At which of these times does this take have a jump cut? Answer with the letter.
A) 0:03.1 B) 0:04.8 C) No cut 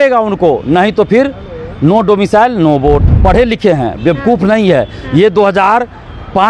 A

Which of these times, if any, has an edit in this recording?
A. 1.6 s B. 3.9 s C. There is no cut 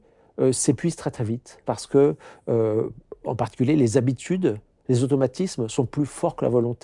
A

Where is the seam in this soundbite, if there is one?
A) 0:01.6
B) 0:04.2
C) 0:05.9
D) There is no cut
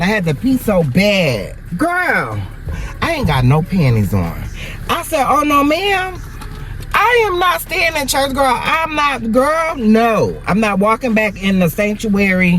A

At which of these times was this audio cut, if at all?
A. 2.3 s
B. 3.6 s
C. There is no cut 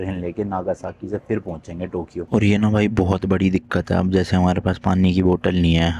A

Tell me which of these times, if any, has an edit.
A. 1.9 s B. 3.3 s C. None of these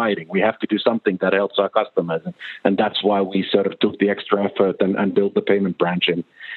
C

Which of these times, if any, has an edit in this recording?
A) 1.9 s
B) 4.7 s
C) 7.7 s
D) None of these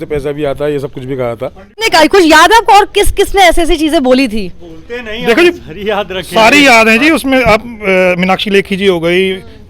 A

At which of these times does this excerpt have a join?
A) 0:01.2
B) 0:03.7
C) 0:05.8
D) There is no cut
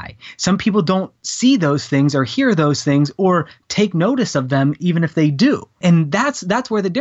C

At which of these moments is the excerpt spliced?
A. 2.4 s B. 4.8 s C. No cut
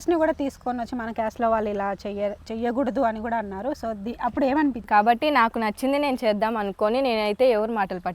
B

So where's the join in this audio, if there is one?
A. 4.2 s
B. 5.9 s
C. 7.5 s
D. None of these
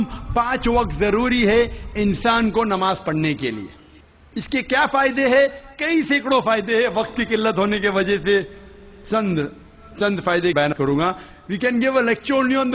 D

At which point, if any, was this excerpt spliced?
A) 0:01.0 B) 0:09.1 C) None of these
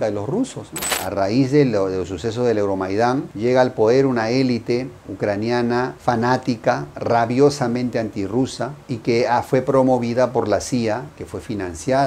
A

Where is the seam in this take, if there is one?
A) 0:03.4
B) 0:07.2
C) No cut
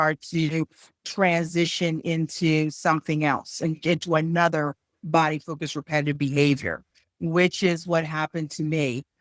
C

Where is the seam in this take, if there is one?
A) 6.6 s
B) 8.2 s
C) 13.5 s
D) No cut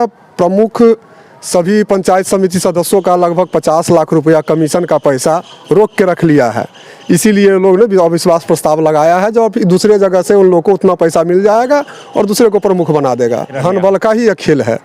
C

